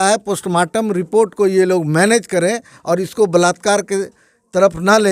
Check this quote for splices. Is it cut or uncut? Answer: uncut